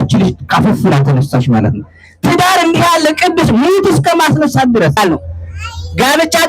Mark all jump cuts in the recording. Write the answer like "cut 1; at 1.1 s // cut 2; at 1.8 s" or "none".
cut 1; at 5.0 s